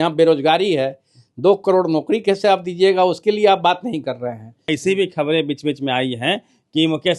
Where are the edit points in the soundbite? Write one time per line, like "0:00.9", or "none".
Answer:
0:04.7

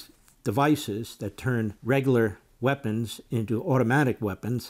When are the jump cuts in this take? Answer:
0:01.8

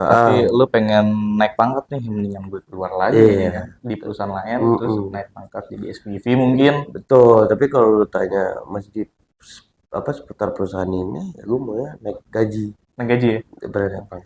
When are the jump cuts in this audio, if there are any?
none

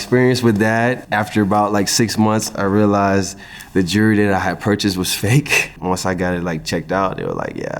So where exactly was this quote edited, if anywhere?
0:01.0
0:05.8

